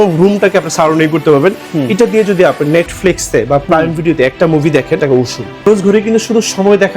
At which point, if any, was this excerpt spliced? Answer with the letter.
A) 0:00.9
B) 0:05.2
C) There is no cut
B